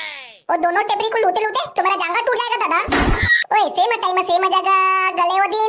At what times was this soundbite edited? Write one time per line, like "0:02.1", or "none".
0:03.2

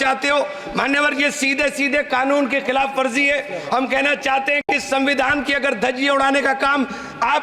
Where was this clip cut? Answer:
none

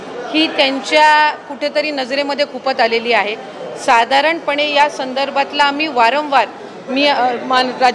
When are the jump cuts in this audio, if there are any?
none

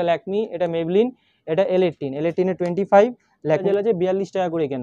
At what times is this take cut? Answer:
0:03.6

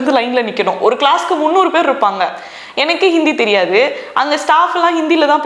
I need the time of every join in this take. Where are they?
none

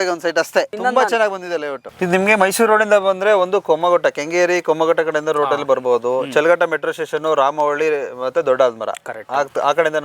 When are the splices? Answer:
0:01.8

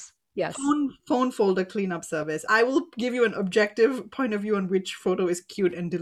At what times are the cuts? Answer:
0:02.4

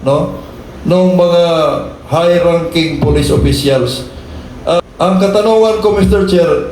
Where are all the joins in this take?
0:04.8

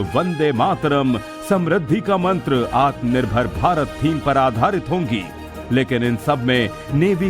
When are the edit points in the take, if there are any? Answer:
0:01.8

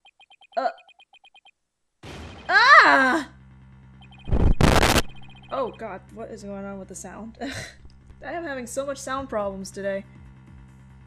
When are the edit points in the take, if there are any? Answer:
0:07.4

